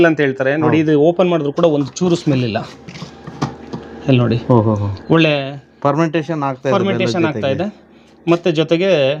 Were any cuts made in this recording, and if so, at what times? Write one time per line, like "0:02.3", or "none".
none